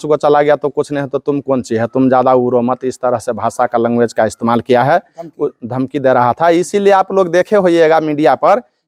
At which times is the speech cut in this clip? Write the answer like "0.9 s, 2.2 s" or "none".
none